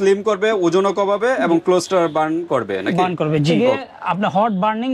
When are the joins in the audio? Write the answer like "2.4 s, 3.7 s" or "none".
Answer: 3.5 s